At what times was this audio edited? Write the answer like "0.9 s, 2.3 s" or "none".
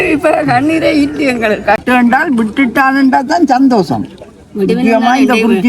1.8 s